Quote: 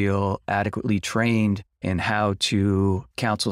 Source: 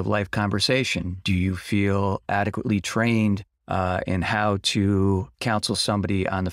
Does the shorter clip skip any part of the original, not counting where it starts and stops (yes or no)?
yes